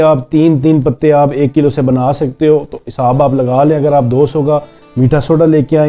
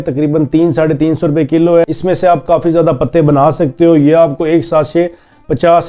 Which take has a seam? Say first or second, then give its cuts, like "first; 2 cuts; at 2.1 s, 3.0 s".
second; 1 cut; at 1.9 s